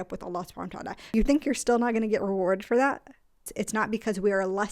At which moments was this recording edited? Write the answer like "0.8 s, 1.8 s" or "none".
1.0 s, 3.5 s